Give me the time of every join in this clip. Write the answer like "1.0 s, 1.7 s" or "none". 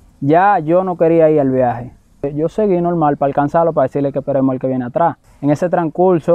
2.3 s, 5.3 s